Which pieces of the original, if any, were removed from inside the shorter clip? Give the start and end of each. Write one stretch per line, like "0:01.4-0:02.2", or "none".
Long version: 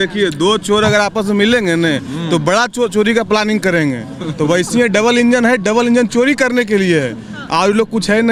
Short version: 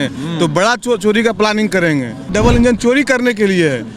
0:04.2-0:05.6